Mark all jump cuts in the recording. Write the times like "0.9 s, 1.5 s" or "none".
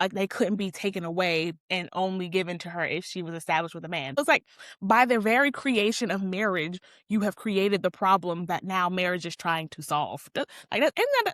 4.2 s